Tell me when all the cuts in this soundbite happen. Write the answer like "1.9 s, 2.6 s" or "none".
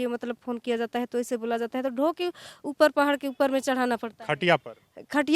none